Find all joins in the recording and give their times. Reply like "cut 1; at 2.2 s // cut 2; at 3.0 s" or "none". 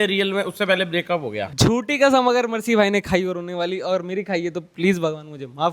cut 1; at 1.4 s